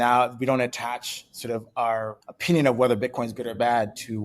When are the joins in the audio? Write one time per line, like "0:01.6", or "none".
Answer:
0:02.3